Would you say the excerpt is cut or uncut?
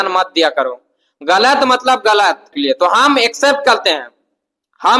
cut